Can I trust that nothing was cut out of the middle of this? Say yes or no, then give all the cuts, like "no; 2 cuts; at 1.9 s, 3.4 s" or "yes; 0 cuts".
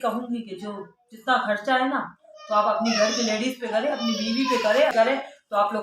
no; 1 cut; at 4.9 s